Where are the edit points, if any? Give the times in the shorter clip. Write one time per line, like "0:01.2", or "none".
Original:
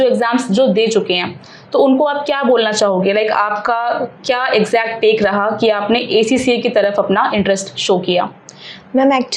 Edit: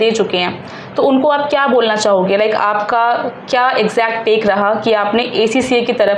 none